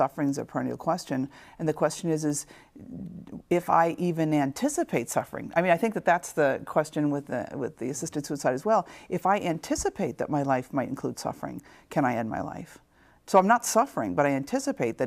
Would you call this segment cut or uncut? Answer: uncut